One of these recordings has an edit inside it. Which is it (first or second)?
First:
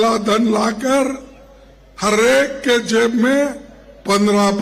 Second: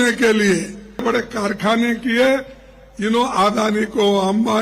second